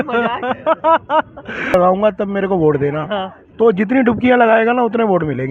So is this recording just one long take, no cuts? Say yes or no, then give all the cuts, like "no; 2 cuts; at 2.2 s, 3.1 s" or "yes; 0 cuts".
no; 1 cut; at 1.7 s